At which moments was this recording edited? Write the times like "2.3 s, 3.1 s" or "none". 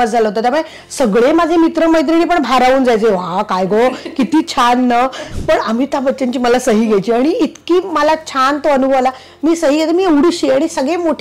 5.2 s